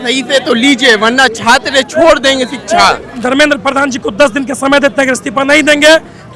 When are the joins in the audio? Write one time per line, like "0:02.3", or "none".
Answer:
0:03.1